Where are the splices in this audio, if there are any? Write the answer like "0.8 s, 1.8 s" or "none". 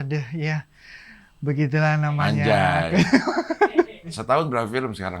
4.2 s